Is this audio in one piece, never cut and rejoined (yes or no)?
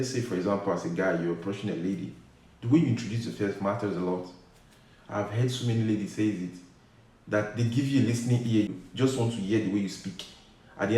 no